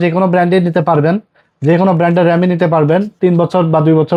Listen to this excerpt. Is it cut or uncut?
uncut